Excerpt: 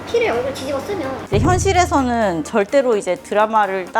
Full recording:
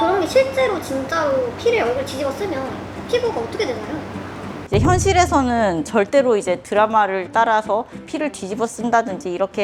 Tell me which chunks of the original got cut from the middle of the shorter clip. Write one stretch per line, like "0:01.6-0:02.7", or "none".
0:02.7-0:04.6